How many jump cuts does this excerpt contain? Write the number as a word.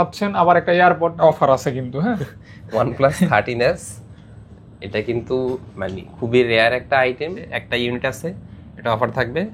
two